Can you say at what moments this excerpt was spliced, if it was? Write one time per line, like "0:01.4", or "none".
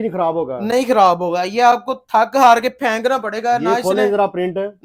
none